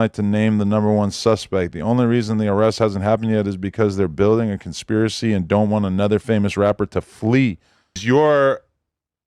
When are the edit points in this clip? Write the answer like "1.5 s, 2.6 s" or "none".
8.0 s